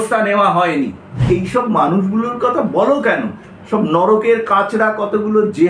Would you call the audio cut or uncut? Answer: cut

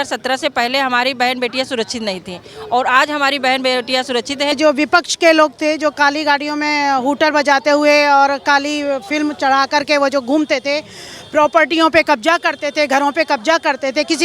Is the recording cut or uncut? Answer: cut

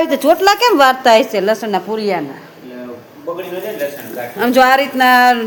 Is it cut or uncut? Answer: uncut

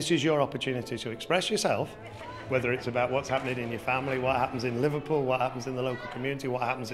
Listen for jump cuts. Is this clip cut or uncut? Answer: uncut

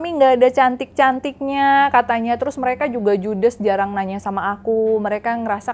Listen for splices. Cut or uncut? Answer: uncut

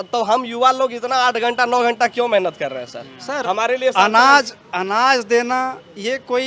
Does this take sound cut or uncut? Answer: uncut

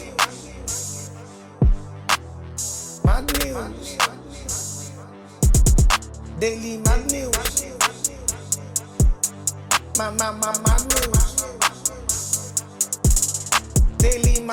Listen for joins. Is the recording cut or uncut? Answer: uncut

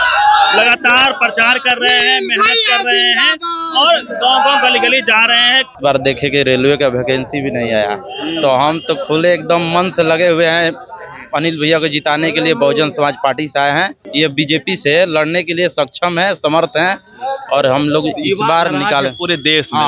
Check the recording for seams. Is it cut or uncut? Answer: cut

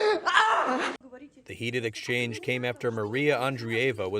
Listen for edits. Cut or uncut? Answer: cut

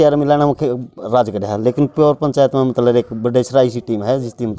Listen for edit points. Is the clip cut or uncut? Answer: uncut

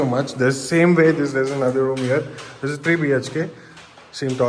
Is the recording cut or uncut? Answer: uncut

